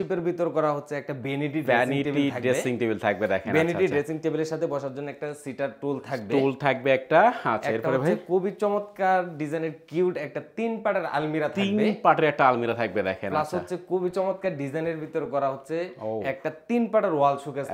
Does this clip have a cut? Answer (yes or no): no